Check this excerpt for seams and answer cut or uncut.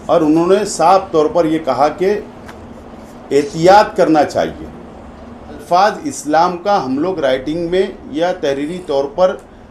cut